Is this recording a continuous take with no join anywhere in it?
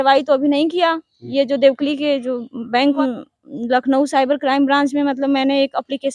no; 1 cut; at 3.0 s

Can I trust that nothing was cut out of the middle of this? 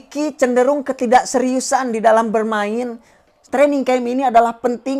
no; 1 cut; at 3.4 s

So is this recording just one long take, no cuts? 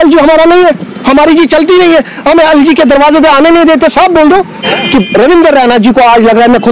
no; 1 cut; at 4.7 s

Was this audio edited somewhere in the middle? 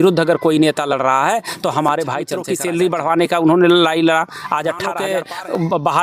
yes; 2 cuts; at 2.4 s, 5.0 s

